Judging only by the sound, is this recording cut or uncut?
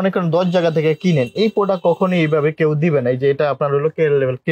uncut